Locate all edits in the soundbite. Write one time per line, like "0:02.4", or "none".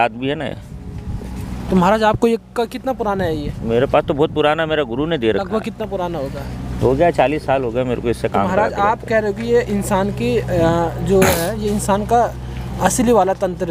none